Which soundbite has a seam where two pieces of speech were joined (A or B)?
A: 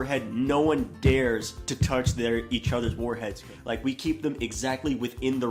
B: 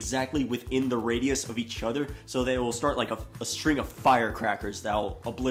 A